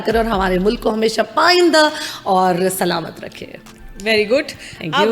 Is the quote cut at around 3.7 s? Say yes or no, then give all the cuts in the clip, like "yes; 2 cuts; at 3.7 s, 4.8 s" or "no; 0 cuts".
no; 0 cuts